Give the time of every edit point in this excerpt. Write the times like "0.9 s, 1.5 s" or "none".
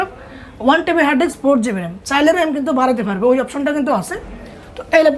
none